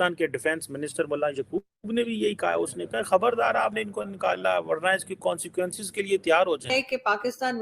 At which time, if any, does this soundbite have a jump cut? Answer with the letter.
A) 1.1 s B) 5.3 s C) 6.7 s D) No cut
C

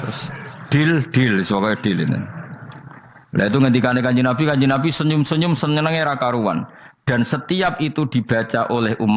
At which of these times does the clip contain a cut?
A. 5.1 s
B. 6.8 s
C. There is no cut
C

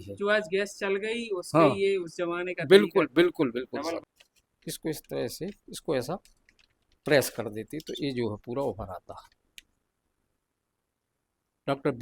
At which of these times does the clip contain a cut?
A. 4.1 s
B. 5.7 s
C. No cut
A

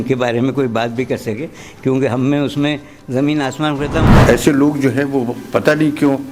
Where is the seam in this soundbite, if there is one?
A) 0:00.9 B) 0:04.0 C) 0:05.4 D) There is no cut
B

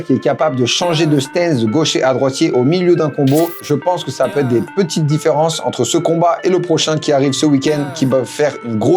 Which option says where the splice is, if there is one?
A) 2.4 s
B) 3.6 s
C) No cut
B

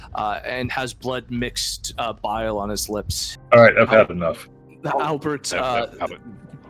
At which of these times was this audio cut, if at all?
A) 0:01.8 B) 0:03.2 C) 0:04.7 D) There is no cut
B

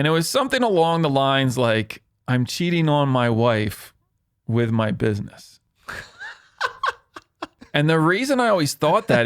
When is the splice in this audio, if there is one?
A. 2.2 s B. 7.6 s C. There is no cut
B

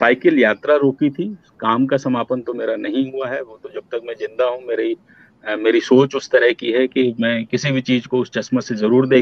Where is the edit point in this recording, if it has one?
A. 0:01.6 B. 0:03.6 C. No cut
C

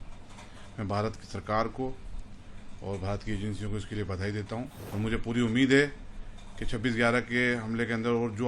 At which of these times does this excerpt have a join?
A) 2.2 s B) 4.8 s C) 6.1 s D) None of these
B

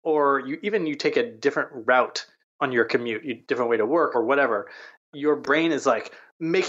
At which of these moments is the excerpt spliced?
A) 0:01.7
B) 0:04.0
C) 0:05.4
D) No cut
C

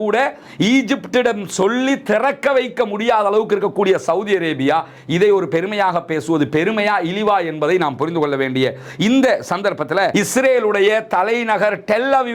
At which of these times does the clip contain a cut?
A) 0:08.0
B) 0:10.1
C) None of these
B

